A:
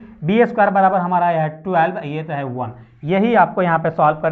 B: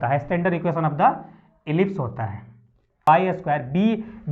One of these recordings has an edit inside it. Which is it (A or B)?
B